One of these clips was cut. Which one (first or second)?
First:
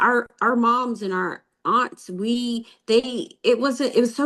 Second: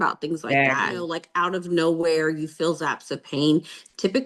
second